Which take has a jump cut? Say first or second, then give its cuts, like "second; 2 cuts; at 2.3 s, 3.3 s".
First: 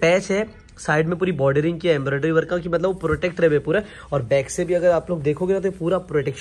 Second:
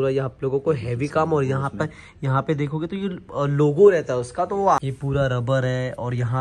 second; 1 cut; at 4.8 s